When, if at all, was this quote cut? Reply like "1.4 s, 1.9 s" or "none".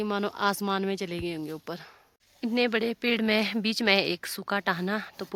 none

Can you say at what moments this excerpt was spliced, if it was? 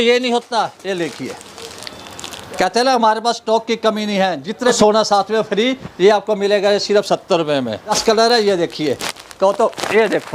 4.8 s, 8.0 s

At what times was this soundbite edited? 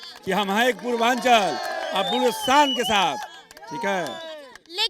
none

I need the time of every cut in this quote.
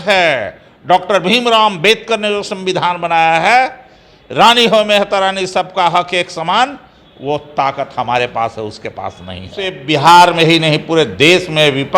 9.8 s

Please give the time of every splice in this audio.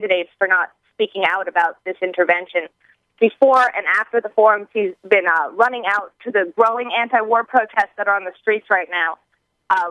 none

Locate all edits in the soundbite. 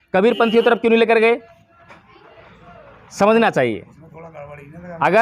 none

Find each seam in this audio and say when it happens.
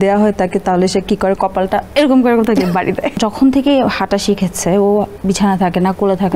1.9 s, 3.2 s, 5.1 s

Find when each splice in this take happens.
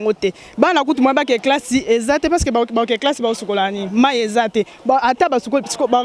none

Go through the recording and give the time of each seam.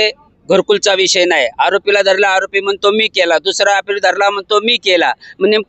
none

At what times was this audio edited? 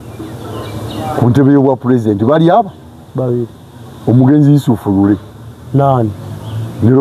none

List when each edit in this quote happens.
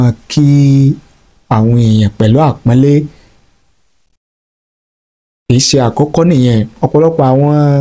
6.8 s

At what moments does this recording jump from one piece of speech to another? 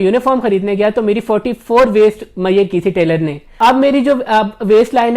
3.4 s

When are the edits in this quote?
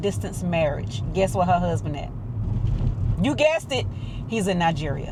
none

